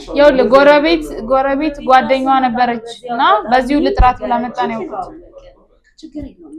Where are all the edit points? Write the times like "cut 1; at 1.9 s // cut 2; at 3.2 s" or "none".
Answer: none